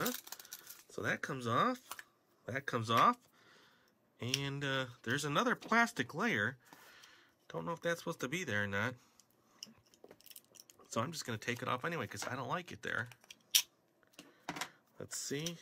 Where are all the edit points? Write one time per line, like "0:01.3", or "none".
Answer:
none